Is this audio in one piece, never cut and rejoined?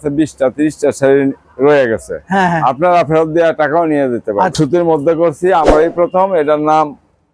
no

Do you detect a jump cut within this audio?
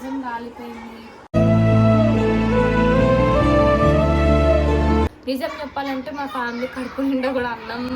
yes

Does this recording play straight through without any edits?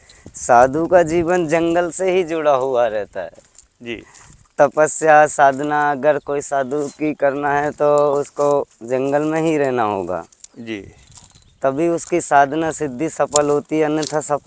yes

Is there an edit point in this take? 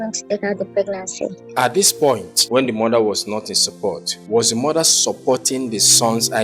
yes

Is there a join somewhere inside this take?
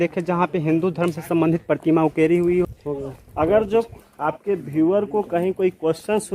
yes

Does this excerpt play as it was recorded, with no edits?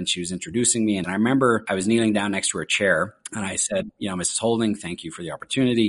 no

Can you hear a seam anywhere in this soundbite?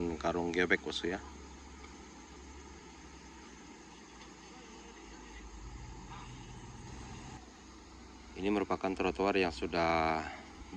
yes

